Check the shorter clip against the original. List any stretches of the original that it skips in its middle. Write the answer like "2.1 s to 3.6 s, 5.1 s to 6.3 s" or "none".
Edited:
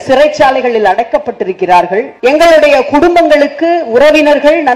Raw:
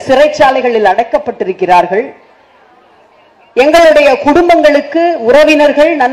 2.1 s to 3.5 s